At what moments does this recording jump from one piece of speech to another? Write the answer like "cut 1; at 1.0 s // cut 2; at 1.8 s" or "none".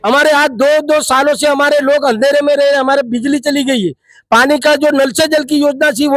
none